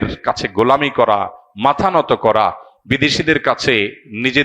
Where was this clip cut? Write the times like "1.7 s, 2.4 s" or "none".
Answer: none